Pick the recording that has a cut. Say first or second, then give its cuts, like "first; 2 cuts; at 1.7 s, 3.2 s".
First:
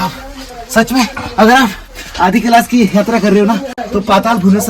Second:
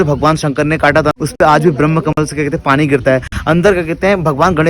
second; 1 cut; at 1.1 s